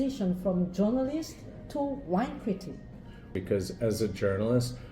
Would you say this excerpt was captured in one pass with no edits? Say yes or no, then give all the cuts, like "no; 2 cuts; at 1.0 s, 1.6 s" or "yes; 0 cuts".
no; 1 cut; at 3.3 s